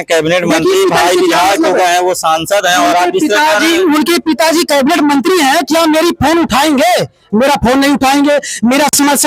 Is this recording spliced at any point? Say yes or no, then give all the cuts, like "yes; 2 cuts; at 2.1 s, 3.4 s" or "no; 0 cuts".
no; 0 cuts